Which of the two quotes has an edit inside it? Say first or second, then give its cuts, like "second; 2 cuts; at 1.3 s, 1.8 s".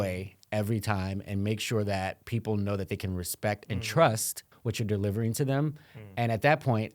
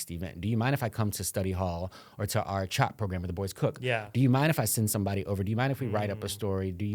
first; 1 cut; at 4.4 s